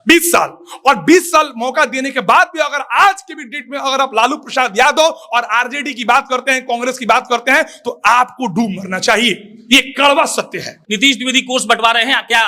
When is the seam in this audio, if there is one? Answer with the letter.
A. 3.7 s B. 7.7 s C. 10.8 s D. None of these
C